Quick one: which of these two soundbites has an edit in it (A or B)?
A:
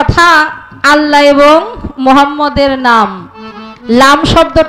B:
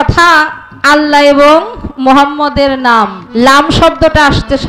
B